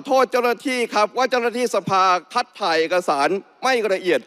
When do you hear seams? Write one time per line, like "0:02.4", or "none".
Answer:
none